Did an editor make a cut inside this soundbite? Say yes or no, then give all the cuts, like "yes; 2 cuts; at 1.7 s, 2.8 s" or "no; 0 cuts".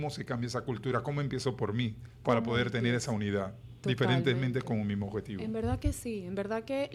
no; 0 cuts